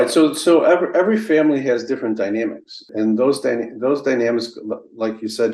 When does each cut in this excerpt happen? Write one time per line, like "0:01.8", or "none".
0:02.9